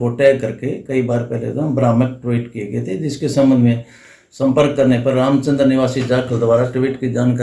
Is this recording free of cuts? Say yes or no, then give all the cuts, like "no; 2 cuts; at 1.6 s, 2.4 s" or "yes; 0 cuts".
yes; 0 cuts